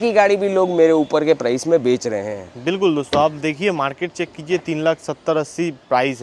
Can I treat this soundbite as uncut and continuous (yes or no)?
yes